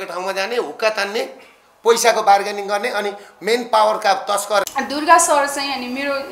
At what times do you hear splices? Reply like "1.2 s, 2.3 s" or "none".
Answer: 4.7 s